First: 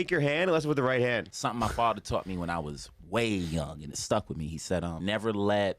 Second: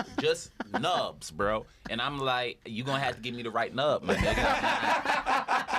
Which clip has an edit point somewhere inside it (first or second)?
first